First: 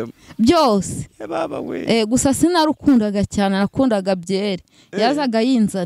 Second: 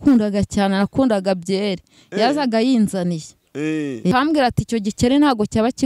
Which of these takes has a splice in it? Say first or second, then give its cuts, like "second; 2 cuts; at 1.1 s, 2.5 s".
second; 1 cut; at 4.1 s